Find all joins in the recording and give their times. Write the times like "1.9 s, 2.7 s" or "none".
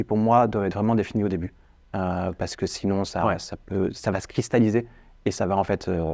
none